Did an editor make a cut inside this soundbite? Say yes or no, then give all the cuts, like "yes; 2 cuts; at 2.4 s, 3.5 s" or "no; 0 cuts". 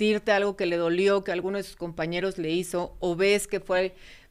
no; 0 cuts